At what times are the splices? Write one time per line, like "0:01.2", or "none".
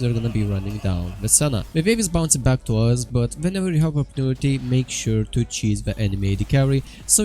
0:01.7